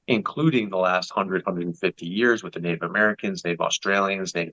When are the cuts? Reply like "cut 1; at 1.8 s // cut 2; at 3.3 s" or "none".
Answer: none